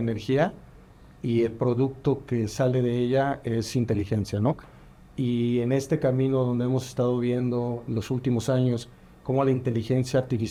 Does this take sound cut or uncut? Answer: uncut